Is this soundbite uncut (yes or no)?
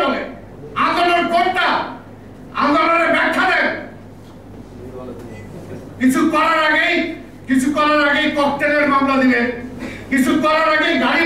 yes